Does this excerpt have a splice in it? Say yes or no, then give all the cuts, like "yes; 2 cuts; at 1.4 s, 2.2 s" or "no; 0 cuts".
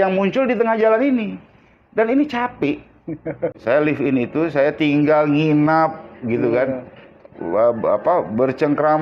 yes; 1 cut; at 3.5 s